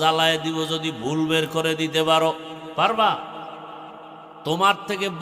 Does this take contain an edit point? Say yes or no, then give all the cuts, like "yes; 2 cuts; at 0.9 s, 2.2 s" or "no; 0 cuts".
no; 0 cuts